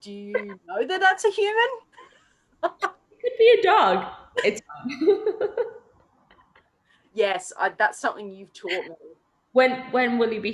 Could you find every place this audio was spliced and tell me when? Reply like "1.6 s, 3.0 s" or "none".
none